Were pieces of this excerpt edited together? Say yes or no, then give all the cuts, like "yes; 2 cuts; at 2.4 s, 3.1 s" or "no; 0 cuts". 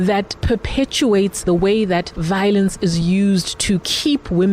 yes; 2 cuts; at 1.5 s, 2.1 s